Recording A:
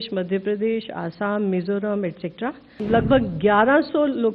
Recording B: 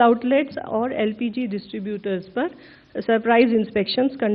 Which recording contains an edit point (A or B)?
A